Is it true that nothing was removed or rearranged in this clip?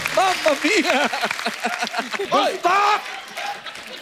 no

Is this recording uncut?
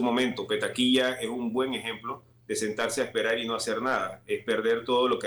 yes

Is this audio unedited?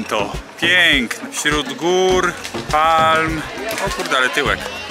no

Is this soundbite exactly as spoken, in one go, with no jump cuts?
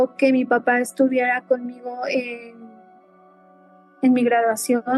yes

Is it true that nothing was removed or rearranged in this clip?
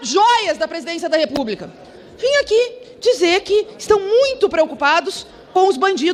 yes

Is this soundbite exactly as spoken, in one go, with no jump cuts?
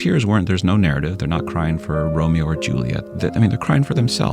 no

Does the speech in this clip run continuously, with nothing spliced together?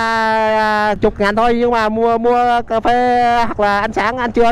no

